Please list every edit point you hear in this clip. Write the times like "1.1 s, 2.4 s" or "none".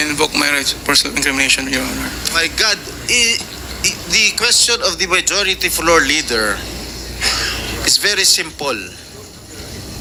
none